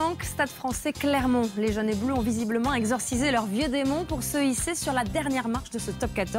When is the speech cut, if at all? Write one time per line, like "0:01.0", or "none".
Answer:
0:02.6